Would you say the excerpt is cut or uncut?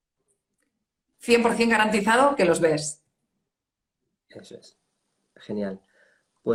uncut